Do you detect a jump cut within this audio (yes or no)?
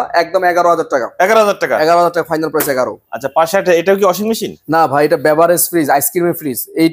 no